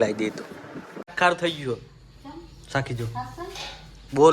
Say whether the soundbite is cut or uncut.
cut